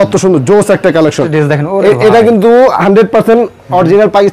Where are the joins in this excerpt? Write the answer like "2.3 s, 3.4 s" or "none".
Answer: 1.2 s